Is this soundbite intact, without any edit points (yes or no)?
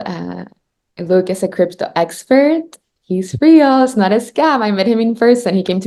yes